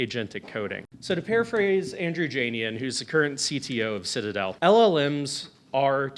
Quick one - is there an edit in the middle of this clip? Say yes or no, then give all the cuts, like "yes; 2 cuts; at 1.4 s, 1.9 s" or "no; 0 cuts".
yes; 2 cuts; at 0.9 s, 4.5 s